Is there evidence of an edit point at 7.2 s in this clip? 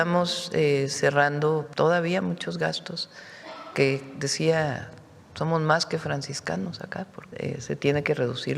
yes; 2 cuts; at 1.7 s, 7.2 s

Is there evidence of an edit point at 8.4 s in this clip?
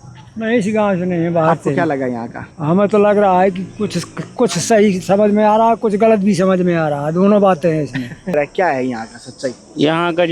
yes; 1 cut; at 8.4 s

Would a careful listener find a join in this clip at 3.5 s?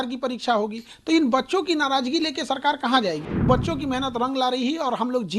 yes; 1 cut; at 3.5 s

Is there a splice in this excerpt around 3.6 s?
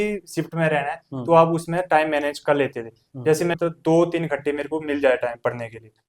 yes; 1 cut; at 3.6 s

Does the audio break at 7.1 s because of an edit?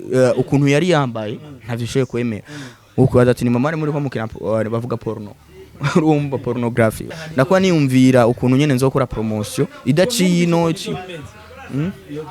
yes; 1 cut; at 7.1 s

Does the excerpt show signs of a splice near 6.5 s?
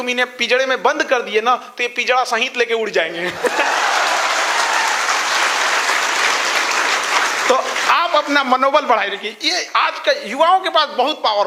no; 0 cuts

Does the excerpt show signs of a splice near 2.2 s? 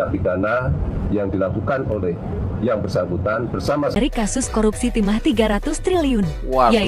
no; 1 cut; at 3.9 s

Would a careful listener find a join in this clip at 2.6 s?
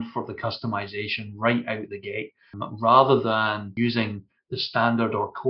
yes; 2 cuts; at 2.6 s, 3.7 s

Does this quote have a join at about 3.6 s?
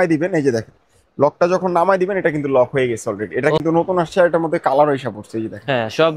yes; 1 cut; at 3.6 s

